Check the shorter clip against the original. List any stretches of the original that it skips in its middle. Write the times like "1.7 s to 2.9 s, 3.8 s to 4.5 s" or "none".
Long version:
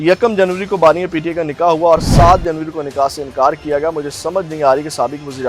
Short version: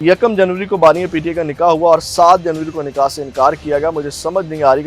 none